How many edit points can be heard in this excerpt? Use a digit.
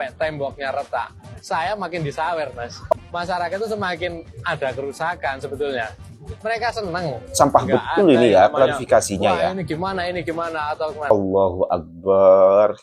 2